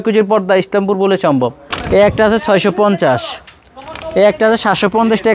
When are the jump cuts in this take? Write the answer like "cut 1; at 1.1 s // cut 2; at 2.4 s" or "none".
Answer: cut 1; at 1.7 s